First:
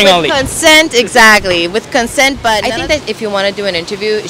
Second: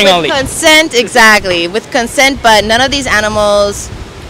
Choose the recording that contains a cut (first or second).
first